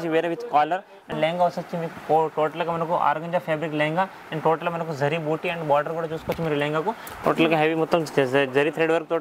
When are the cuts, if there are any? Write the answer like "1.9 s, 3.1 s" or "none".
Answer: 1.0 s, 7.2 s